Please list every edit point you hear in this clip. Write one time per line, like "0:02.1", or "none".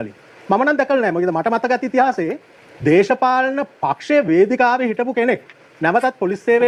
none